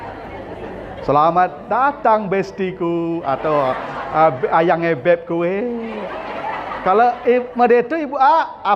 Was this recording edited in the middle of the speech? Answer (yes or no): no